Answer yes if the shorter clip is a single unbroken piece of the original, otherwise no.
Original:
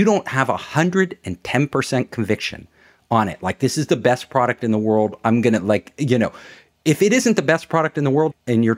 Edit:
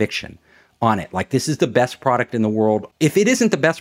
no